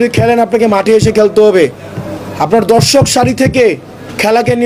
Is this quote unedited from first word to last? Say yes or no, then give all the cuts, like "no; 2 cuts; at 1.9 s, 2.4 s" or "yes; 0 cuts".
yes; 0 cuts